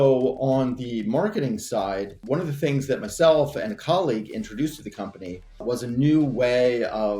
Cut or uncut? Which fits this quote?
cut